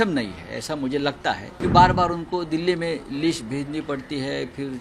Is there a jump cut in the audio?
yes; 1 cut; at 1.5 s

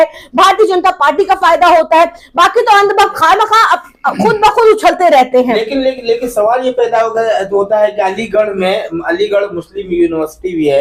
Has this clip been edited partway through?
no; 0 cuts

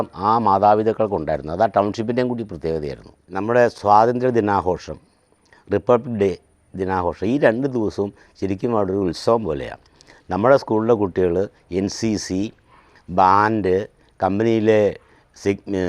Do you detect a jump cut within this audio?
yes; 1 cut; at 3.7 s

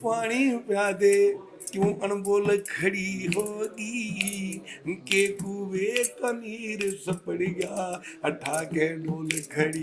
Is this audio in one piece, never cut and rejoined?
yes; 0 cuts

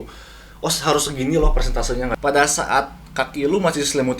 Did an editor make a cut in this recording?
yes; 1 cut; at 2.1 s

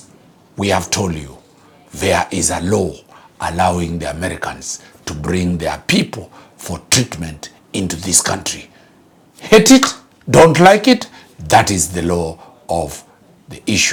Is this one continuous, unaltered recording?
yes; 0 cuts

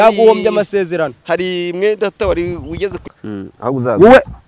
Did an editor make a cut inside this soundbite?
yes; 1 cut; at 3.0 s

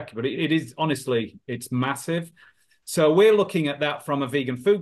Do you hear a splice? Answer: no; 0 cuts

